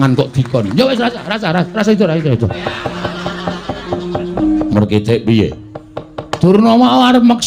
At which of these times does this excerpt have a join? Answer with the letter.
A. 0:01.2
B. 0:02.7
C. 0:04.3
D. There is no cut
C